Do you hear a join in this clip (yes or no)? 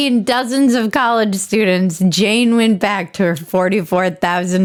no